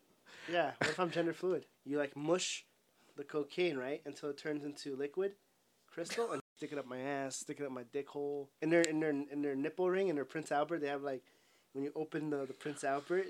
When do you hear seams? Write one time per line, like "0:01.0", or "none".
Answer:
0:01.7
0:06.4
0:08.5